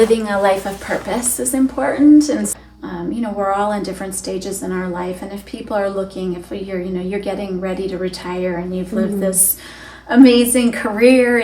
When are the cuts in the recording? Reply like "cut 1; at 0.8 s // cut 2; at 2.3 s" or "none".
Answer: cut 1; at 2.5 s